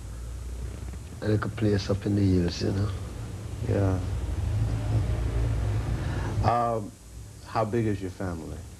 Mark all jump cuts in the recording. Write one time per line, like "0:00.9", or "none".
0:03.9

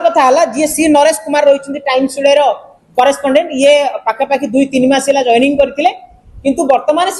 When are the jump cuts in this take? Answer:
none

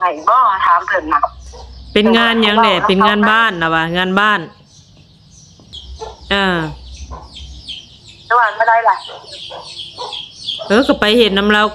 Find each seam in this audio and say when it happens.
0:05.5

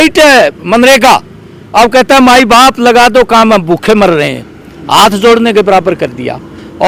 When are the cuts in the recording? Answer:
none

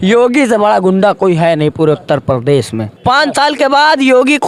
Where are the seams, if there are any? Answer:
0:02.9

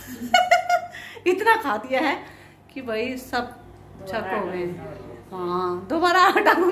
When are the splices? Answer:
none

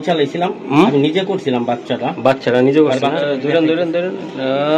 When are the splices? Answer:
0:03.3

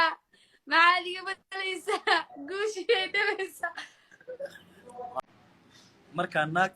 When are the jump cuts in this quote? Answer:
0:05.2

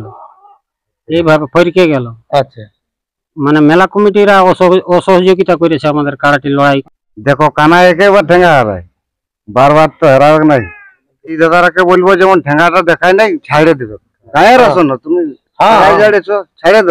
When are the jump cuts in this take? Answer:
0:06.8
0:11.4

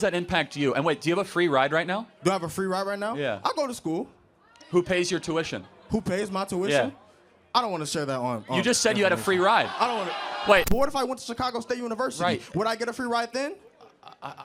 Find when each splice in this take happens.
0:10.7

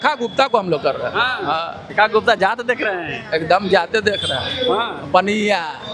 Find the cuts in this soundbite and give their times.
0:01.8

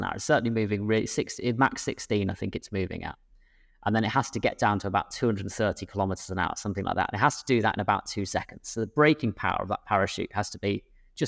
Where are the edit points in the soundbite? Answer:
none

